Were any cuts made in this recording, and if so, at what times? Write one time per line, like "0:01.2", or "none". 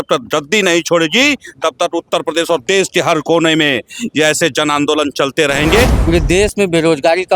0:06.0

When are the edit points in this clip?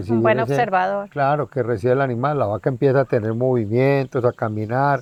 none

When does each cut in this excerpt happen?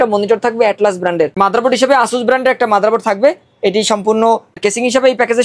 0:01.3
0:04.6

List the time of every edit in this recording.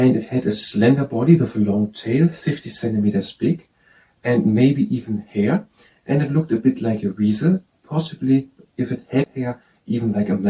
0:09.4

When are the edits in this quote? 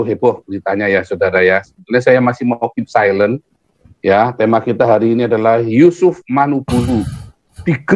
none

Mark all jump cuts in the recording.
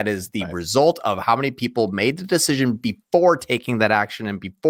none

